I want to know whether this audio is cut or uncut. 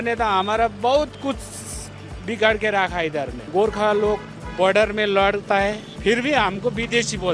cut